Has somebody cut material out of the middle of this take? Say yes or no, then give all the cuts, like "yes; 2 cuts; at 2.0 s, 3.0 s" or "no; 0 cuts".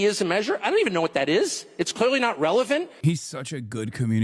yes; 1 cut; at 2.9 s